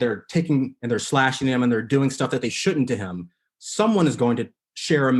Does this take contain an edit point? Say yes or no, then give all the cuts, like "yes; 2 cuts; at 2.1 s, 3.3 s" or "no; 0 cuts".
no; 0 cuts